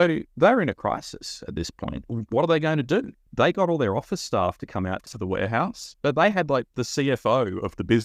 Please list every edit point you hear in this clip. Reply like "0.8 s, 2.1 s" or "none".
2.0 s, 3.2 s, 5.1 s